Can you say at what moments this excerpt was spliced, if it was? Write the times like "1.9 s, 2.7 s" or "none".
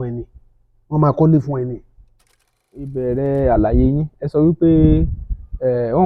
3.0 s